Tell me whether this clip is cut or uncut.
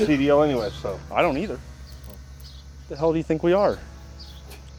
uncut